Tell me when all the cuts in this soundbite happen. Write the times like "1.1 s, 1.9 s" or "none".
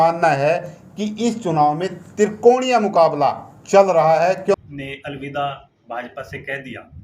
4.5 s

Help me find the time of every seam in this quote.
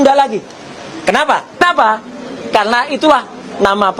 1.6 s

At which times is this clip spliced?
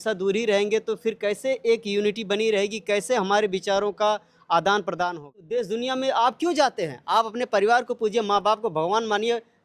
5.4 s

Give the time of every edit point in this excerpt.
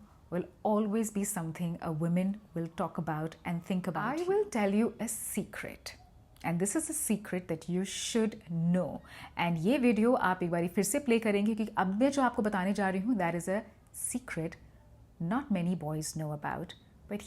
4.3 s

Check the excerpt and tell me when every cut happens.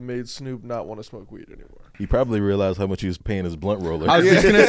1.9 s, 3.2 s

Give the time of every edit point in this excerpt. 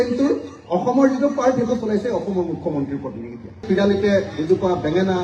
3.6 s

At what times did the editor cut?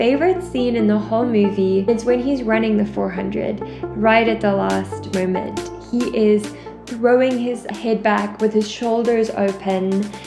1.8 s

